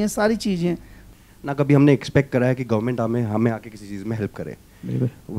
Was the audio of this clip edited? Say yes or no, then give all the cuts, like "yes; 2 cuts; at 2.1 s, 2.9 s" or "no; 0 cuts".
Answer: yes; 1 cut; at 0.9 s